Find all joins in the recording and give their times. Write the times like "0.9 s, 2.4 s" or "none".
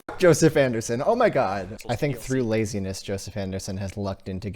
1.7 s

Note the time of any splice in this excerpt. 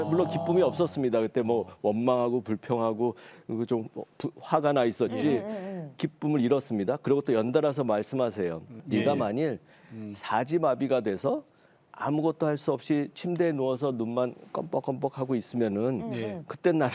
8.8 s

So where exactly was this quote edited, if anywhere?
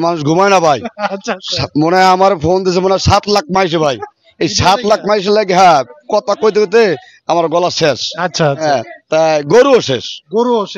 none

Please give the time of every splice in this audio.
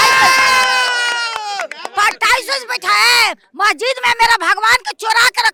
none

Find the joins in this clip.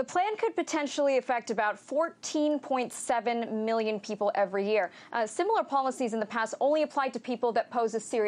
6.7 s

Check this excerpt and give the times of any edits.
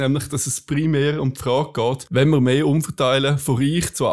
2.0 s

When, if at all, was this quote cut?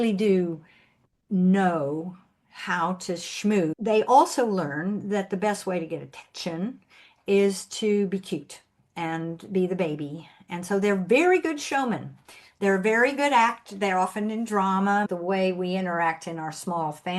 3.8 s, 15.1 s

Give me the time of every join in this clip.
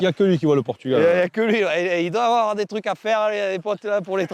none

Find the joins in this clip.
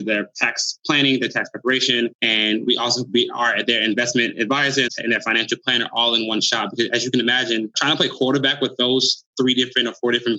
4.9 s

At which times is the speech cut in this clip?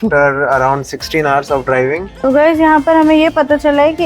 2.1 s

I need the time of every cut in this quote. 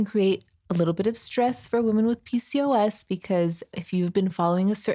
3.7 s

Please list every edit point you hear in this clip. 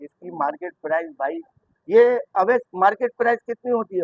none

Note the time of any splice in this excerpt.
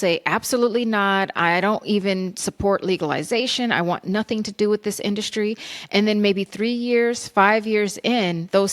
none

